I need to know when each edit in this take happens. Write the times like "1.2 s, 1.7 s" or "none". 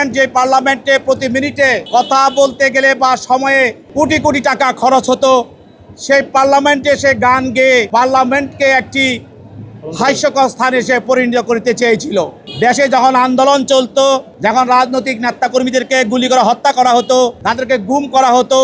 1.8 s, 3.8 s, 7.9 s, 12.4 s, 14.3 s, 17.4 s